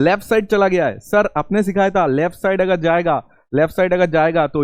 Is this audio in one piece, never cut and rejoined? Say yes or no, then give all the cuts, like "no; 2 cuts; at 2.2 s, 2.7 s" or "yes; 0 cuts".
yes; 0 cuts